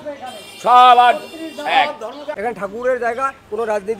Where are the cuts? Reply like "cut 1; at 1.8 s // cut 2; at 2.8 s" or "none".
cut 1; at 2.3 s

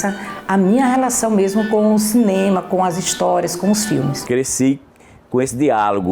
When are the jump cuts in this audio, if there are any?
cut 1; at 4.2 s

